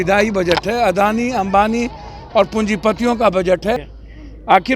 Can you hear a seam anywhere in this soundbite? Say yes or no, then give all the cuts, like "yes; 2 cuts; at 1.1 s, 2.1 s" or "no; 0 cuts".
yes; 1 cut; at 3.8 s